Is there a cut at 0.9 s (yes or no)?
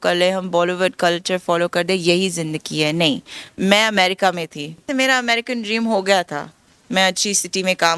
no